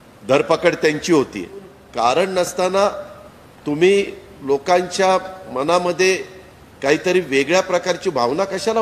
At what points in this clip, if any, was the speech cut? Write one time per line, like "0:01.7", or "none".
0:01.8